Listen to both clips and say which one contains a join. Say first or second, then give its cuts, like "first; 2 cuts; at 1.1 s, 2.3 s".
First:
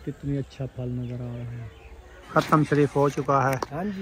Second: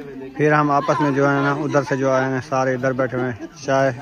first; 1 cut; at 2.2 s